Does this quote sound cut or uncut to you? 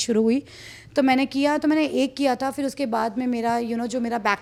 uncut